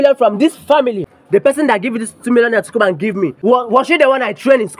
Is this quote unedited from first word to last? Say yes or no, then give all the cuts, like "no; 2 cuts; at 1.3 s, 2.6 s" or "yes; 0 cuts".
no; 2 cuts; at 1.0 s, 3.4 s